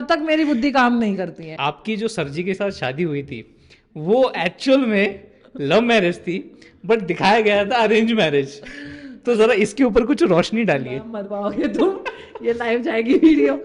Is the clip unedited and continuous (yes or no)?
no